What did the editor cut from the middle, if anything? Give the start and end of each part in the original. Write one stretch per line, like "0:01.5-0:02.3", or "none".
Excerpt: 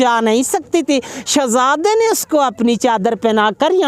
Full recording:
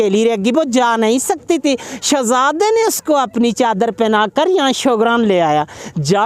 none

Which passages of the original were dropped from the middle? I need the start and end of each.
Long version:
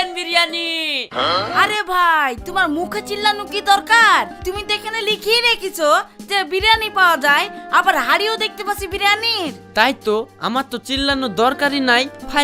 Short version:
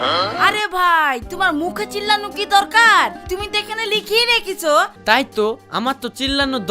0:06.1-0:09.6

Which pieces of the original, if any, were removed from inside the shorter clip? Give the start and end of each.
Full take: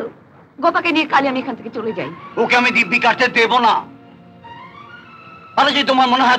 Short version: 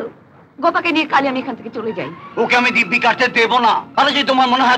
0:03.9-0:05.5

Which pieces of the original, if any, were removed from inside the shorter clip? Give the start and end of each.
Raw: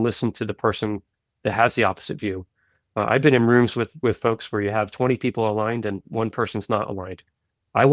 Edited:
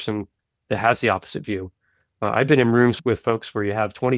0:03.7-0:04.0

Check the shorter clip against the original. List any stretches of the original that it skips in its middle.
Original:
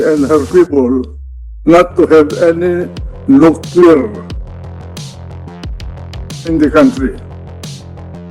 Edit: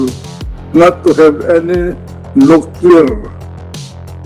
0:04.2-0:04.5

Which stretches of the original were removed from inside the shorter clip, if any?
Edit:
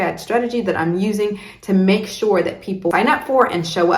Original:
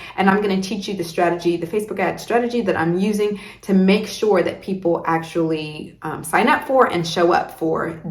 0:04.9-0:06.3

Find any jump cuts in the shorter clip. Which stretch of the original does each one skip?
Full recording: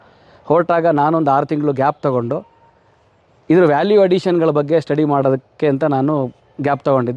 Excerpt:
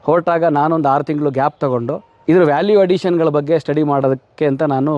0:02.5-0:03.3

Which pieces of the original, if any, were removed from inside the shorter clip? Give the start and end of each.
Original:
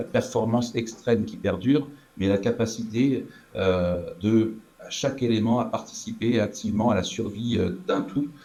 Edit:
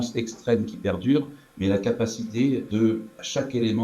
0:03.5-0:04.6

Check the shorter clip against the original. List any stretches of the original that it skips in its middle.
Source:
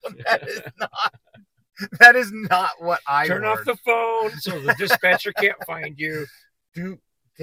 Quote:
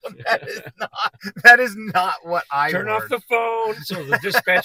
0:01.2-0:01.7

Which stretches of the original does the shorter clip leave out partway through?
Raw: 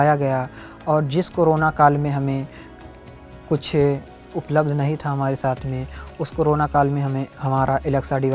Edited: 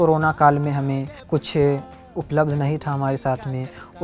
0:02.5-0:03.3

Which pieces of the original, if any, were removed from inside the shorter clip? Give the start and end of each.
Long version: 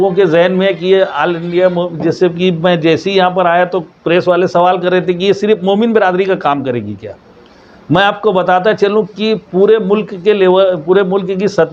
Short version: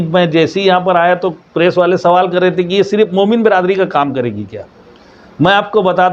none

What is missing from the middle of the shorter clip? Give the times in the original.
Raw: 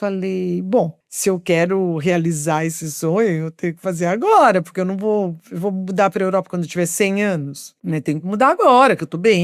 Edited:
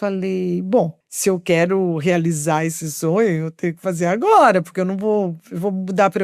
none

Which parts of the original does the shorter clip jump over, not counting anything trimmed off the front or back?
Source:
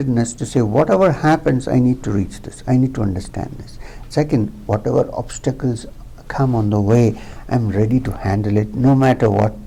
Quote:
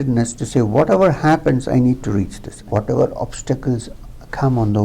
0:02.6-0:04.5

